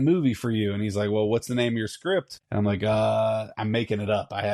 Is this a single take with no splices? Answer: no; 1 cut; at 2.4 s

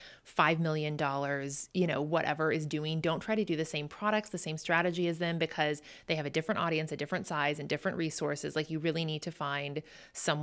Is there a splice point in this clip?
no; 0 cuts

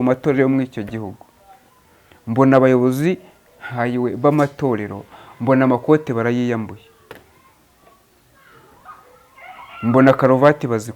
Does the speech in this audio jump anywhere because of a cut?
no; 0 cuts

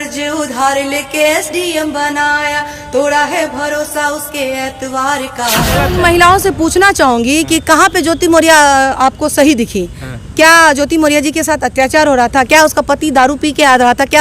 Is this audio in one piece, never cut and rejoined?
no; 1 cut; at 5.9 s

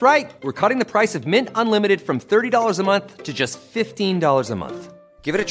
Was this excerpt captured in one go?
yes; 0 cuts

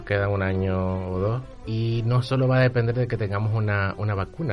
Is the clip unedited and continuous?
no; 1 cut; at 1.6 s

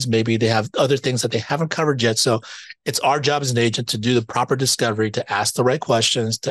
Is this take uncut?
yes; 0 cuts

